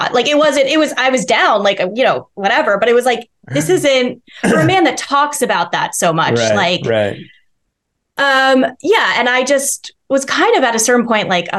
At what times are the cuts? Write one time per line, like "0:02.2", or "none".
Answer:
none